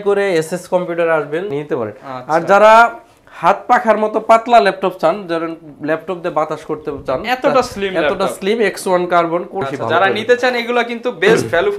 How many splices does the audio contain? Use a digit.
2